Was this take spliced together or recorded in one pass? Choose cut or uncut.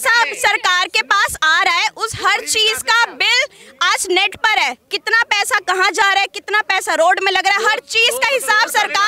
uncut